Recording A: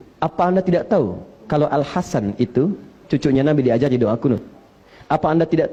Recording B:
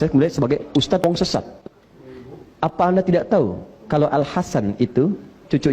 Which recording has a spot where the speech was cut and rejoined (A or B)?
B